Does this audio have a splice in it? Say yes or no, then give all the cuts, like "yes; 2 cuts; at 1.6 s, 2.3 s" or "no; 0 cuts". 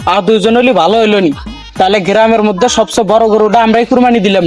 no; 0 cuts